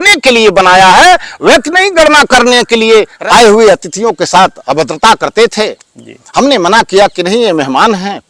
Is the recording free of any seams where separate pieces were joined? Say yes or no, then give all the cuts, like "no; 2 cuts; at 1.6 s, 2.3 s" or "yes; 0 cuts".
no; 1 cut; at 3.1 s